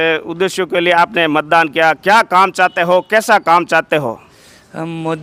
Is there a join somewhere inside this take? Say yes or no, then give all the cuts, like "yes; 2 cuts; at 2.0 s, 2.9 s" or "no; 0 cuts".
no; 0 cuts